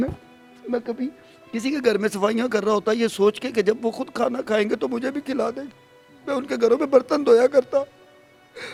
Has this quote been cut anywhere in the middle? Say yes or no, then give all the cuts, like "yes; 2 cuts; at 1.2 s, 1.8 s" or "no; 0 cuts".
no; 0 cuts